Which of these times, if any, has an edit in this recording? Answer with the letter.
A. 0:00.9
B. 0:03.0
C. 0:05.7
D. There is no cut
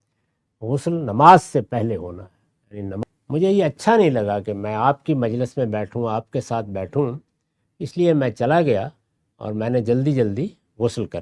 B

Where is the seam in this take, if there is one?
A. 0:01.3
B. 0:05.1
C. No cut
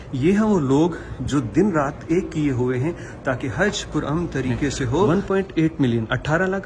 B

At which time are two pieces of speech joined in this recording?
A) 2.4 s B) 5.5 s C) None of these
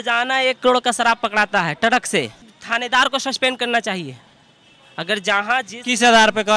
A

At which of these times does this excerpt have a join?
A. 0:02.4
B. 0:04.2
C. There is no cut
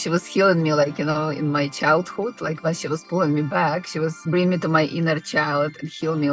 B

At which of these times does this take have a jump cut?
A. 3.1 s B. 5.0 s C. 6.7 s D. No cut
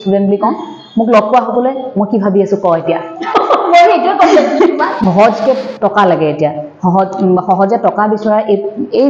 B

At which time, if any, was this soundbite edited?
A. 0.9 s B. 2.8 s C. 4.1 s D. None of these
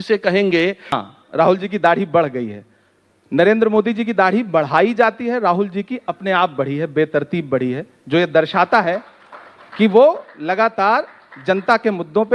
A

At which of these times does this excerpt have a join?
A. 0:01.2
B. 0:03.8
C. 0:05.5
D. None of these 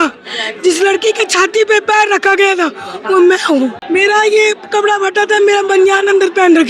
B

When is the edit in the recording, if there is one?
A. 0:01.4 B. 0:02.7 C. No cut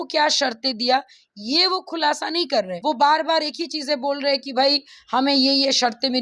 B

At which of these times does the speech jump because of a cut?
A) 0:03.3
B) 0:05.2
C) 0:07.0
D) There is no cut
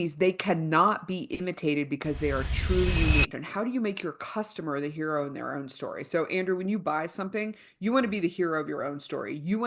A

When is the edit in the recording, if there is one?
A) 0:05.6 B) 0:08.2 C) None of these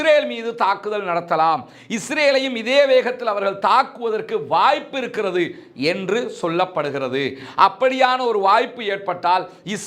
C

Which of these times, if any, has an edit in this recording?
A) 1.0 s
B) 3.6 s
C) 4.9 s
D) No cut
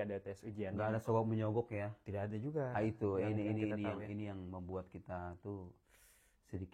D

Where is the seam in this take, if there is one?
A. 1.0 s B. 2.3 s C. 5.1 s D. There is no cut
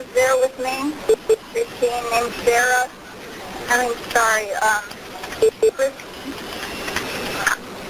D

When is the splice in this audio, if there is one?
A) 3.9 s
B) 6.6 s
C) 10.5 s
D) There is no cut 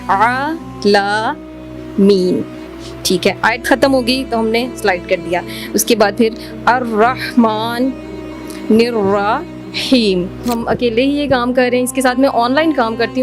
C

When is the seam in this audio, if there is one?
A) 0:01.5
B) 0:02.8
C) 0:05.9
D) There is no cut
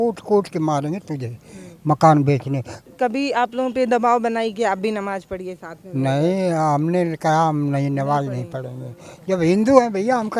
B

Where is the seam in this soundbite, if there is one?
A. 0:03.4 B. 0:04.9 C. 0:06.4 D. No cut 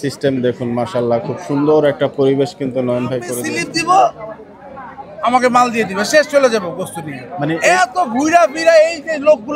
A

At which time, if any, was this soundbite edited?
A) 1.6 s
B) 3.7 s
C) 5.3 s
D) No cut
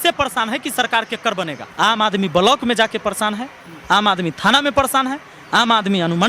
A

